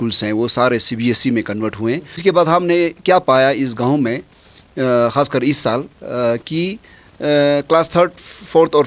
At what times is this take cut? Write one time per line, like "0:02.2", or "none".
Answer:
0:02.2